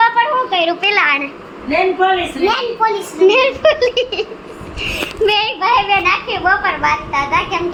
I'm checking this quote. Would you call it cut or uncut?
uncut